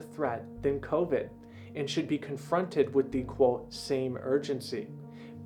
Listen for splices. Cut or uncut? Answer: uncut